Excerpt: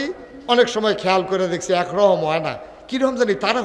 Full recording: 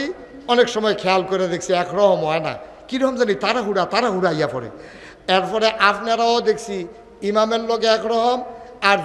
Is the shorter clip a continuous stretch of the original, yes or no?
yes